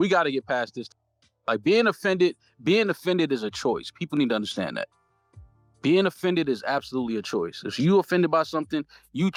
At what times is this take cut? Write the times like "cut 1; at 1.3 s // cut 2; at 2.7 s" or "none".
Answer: none